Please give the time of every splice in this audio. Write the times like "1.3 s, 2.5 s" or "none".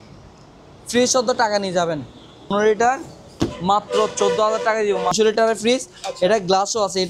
2.5 s, 5.1 s